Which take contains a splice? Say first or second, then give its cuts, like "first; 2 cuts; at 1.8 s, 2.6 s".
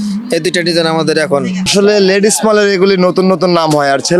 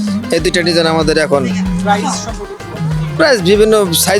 first; 1 cut; at 1.7 s